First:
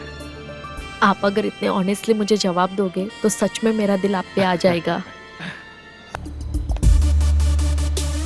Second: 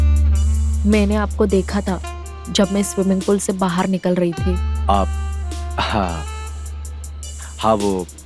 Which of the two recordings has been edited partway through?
first; 1 cut; at 6.1 s

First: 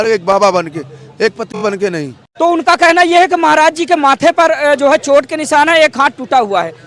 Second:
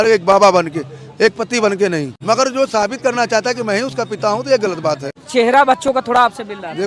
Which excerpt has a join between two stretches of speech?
second; 2 cuts; at 1.5 s, 5.2 s

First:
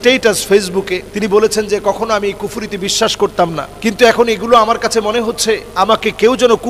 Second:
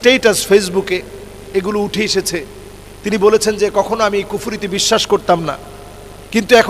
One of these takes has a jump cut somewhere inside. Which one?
first; 3 cuts; at 1.1 s, 3.7 s, 5.7 s

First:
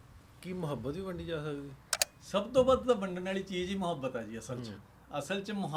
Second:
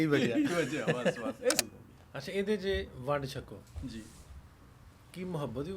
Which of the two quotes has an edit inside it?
second; 1 cut; at 1.6 s

